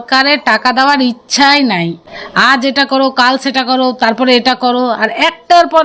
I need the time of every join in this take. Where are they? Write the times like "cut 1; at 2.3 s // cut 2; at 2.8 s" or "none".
cut 1; at 2.0 s